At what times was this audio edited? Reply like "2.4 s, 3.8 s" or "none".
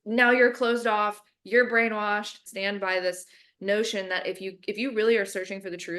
2.5 s